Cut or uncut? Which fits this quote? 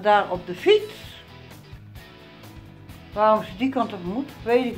cut